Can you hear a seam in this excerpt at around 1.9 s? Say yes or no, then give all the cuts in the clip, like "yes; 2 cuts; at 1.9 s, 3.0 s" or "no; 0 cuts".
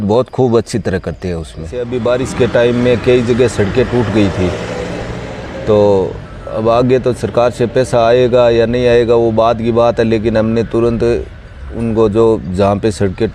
yes; 1 cut; at 1.9 s